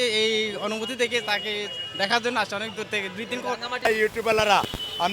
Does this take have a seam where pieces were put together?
yes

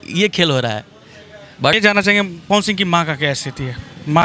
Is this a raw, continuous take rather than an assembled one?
no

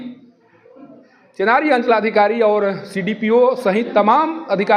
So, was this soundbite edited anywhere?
no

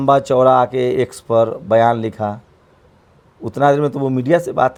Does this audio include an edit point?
no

